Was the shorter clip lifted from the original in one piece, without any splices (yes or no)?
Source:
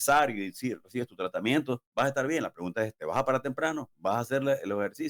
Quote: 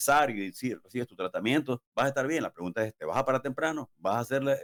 yes